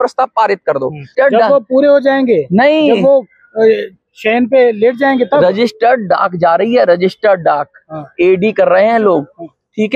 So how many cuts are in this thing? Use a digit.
1